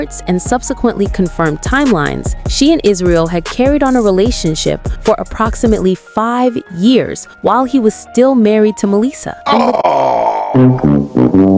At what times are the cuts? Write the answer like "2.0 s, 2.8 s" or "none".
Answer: none